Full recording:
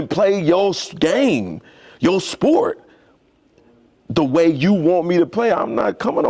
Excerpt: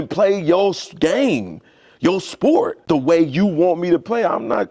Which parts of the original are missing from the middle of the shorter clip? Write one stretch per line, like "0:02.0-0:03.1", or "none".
0:02.8-0:04.0